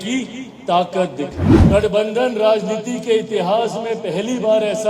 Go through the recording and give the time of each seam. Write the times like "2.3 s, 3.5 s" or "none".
1.5 s